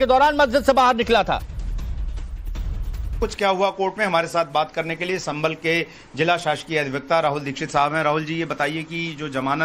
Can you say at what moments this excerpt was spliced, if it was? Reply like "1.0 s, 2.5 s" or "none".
1.0 s